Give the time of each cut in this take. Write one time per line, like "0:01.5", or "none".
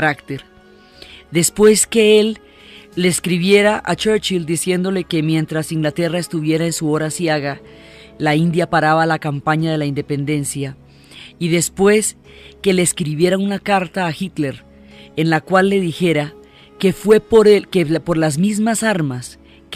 none